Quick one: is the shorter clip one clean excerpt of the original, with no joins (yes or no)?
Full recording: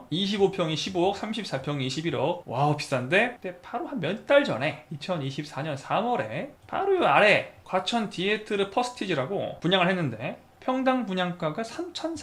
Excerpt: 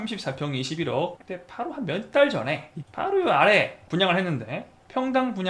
no